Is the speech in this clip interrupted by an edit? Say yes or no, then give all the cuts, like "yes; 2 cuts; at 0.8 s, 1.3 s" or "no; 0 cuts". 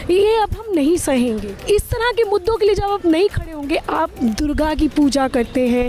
yes; 1 cut; at 1.4 s